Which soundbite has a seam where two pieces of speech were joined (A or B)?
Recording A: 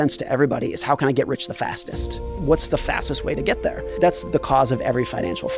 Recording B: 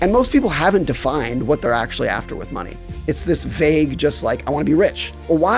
A